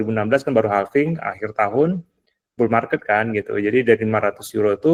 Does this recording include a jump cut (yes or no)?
no